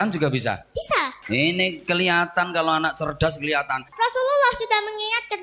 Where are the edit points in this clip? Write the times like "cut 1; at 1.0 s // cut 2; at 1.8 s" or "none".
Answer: cut 1; at 1.2 s // cut 2; at 3.9 s

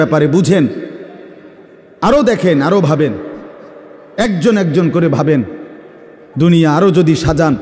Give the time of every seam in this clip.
none

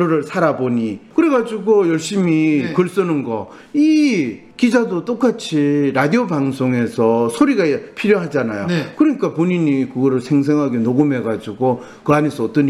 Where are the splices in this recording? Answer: cut 1; at 1.0 s // cut 2; at 4.4 s

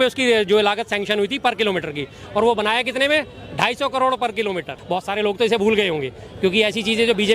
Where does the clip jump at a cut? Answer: cut 1; at 4.8 s

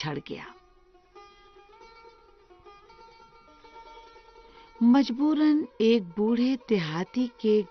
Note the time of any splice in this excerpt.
none

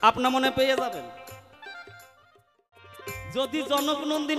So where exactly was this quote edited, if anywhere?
cut 1; at 3.0 s

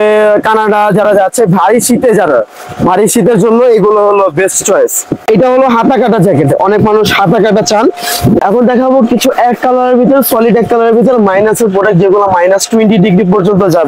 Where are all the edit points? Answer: cut 1; at 5.2 s // cut 2; at 8.4 s

